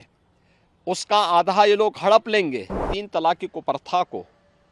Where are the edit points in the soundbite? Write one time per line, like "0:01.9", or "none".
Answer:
0:02.9